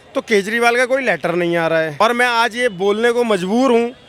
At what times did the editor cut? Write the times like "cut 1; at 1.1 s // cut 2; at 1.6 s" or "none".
cut 1; at 1.9 s